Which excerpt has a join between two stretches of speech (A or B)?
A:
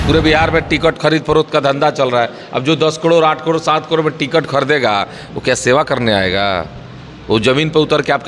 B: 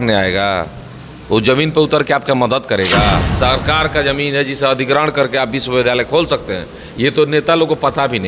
B